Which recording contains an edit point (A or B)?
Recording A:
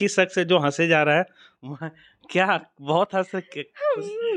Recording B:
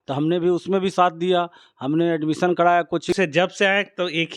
B